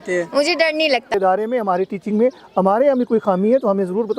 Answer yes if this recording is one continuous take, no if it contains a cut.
no